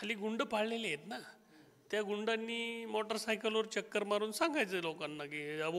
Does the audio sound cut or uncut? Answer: uncut